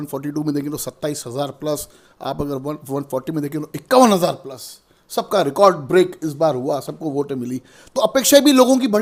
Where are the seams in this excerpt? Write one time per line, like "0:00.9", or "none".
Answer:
none